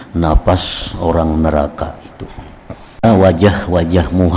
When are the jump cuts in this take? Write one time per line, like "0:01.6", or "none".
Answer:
0:03.0